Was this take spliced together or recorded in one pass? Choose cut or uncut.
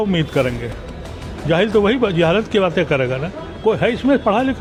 uncut